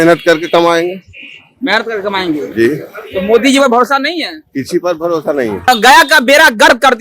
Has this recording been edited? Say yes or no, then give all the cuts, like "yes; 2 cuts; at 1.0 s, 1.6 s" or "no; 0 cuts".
yes; 1 cut; at 5.7 s